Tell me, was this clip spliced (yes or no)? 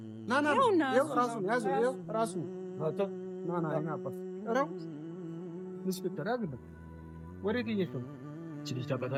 no